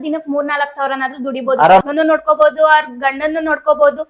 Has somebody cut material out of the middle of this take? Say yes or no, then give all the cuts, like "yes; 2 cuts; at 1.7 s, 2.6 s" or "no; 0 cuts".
yes; 1 cut; at 1.8 s